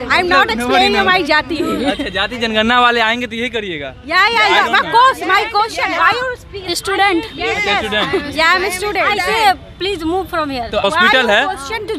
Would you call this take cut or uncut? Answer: cut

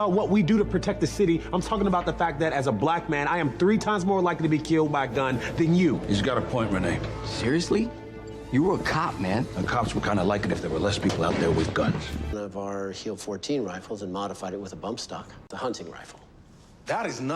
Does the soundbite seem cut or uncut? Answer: cut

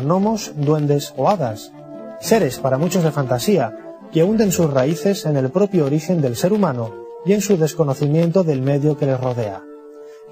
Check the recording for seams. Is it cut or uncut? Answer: uncut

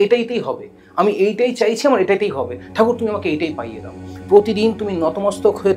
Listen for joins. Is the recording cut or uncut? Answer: uncut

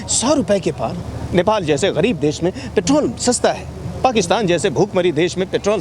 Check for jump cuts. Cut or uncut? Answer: uncut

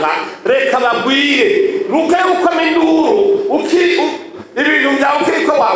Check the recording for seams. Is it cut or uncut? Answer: uncut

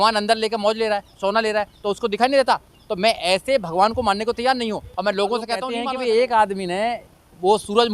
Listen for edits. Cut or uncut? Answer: cut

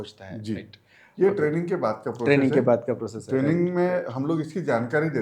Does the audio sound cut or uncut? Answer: uncut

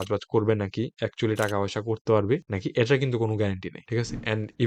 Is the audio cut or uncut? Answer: uncut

